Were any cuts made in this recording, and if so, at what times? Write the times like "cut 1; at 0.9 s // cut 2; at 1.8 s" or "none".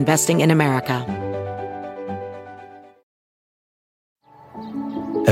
cut 1; at 1.0 s